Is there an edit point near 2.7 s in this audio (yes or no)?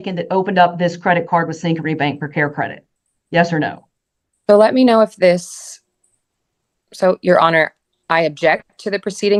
no